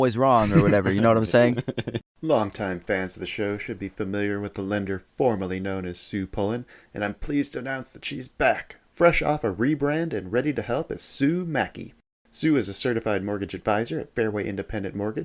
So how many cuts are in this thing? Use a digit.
1